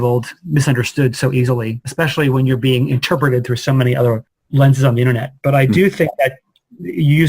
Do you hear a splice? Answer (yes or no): yes